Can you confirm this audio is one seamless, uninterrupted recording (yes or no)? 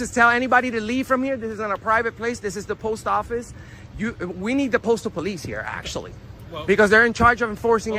yes